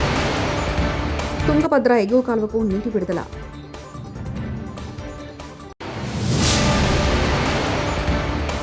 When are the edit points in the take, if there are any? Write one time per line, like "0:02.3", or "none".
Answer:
0:01.4